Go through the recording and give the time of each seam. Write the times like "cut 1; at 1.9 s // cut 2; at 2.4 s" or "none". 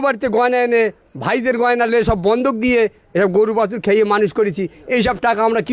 none